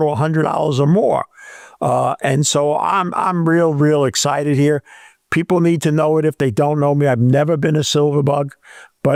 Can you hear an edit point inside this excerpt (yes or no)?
no